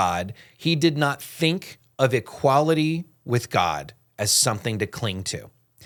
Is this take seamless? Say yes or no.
yes